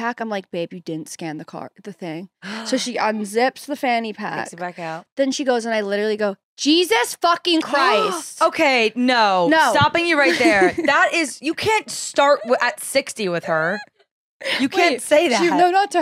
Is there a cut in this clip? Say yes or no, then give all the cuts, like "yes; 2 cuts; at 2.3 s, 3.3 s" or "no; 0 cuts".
no; 0 cuts